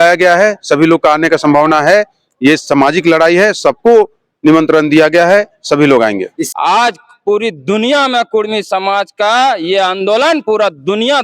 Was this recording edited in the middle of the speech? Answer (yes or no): yes